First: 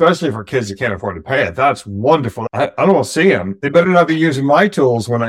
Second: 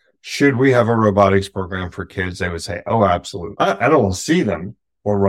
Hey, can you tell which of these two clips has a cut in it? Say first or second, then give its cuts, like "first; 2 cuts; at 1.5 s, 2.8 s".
first; 1 cut; at 2.3 s